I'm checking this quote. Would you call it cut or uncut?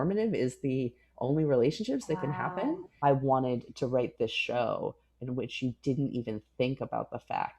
cut